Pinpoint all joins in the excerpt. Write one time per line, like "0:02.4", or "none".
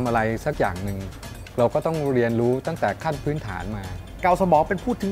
0:04.1